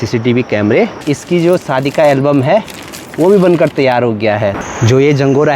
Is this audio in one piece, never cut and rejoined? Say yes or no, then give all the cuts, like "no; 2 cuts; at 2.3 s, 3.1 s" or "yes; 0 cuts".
no; 2 cuts; at 1.0 s, 4.6 s